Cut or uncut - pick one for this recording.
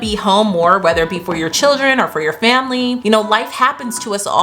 cut